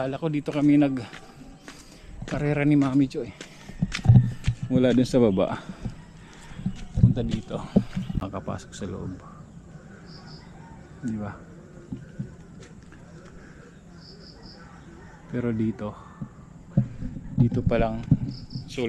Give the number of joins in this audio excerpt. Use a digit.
1